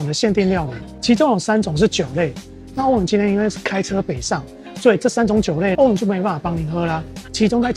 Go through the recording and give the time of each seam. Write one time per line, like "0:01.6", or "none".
none